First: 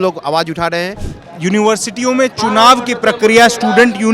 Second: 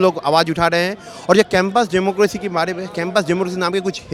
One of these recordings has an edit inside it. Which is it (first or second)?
first